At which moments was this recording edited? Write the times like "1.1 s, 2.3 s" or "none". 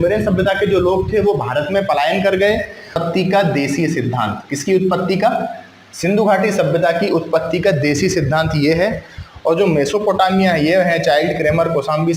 3.0 s